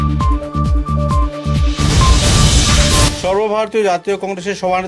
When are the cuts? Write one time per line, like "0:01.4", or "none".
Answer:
none